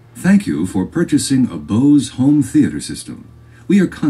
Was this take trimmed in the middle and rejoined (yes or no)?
no